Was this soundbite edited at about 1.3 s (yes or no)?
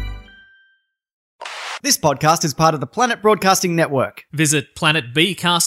yes